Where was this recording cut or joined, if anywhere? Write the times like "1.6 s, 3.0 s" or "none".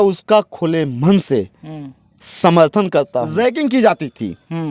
3.3 s